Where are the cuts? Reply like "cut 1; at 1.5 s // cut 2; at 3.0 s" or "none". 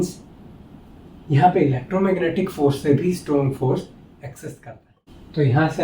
cut 1; at 4.6 s